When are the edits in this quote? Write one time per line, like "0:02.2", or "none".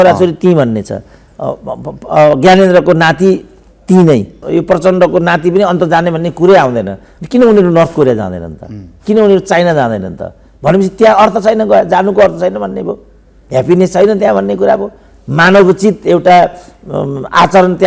0:04.4